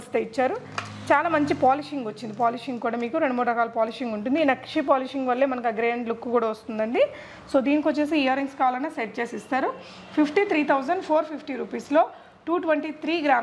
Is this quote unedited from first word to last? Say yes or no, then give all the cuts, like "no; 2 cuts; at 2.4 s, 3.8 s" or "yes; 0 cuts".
yes; 0 cuts